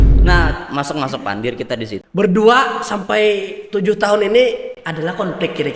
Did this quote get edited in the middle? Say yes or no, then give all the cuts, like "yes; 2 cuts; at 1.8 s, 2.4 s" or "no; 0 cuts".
yes; 1 cut; at 2.0 s